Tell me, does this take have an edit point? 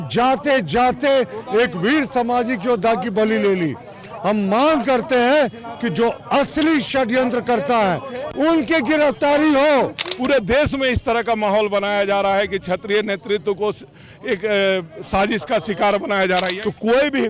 yes; 2 cuts; at 10.0 s, 16.5 s

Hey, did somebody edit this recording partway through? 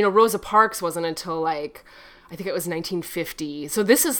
no; 0 cuts

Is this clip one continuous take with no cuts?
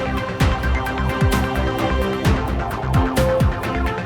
yes; 0 cuts

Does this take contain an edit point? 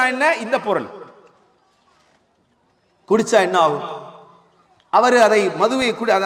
no; 0 cuts

